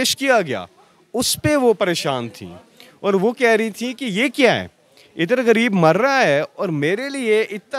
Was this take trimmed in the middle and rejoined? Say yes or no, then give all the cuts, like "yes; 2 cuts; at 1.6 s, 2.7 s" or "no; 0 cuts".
no; 0 cuts